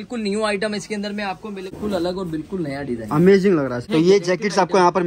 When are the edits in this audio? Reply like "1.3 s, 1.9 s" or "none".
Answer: 1.8 s, 3.8 s